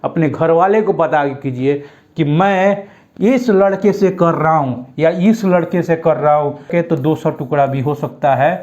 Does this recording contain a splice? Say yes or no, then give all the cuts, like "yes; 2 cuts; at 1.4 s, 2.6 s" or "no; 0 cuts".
yes; 1 cut; at 6.7 s